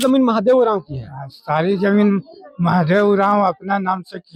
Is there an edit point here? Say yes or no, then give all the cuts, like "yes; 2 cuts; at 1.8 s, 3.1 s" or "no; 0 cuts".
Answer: no; 0 cuts